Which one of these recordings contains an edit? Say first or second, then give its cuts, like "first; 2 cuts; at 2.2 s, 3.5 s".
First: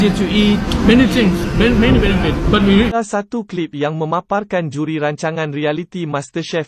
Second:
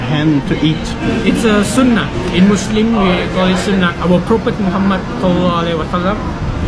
first; 1 cut; at 2.9 s